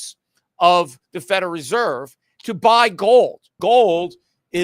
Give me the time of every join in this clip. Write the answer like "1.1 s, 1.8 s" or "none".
3.5 s

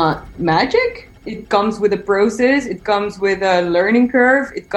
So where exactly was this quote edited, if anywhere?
1.2 s

